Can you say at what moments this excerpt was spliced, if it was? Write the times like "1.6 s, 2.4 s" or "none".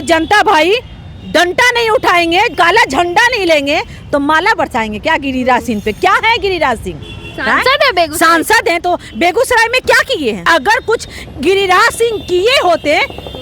2.5 s, 10.5 s